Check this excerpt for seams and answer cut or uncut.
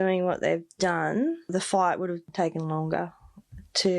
cut